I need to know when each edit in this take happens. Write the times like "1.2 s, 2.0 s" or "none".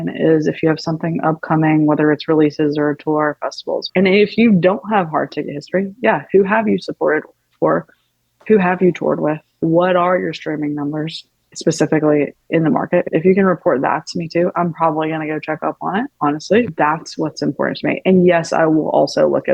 3.9 s, 9.6 s, 13.1 s, 16.7 s